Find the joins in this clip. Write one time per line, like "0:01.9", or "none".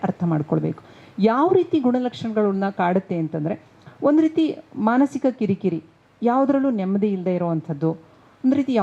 none